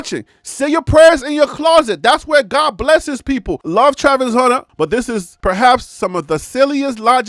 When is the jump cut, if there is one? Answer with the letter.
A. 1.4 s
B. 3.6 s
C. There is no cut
B